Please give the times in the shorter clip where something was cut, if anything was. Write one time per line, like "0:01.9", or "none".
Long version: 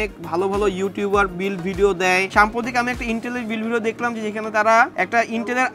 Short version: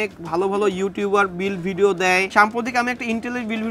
none